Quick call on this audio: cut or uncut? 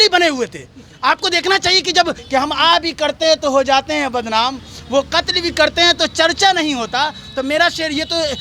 cut